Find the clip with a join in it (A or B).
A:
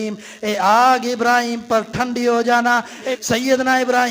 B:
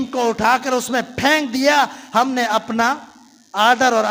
A